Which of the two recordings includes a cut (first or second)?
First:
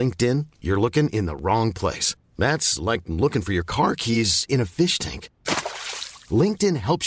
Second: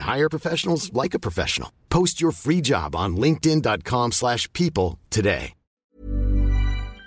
second